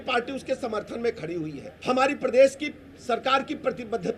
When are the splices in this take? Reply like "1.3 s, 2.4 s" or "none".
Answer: 1.7 s